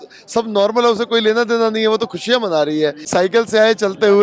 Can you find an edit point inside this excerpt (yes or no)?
yes